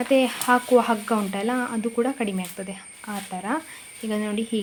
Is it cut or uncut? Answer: uncut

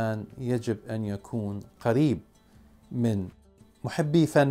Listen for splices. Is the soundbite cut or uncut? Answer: cut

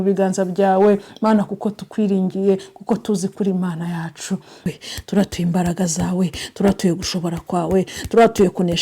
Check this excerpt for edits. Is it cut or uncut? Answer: cut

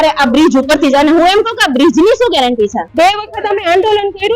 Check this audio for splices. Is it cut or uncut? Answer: cut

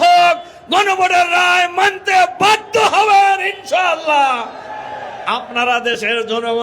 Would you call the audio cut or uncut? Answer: uncut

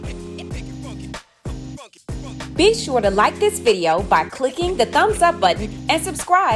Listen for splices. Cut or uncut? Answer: cut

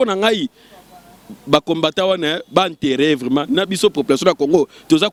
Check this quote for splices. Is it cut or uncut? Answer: uncut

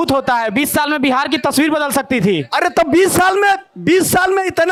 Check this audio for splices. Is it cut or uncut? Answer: uncut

